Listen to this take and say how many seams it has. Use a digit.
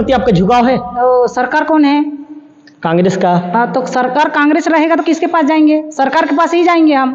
0